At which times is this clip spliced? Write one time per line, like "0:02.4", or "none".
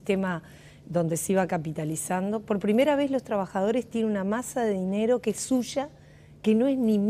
0:01.1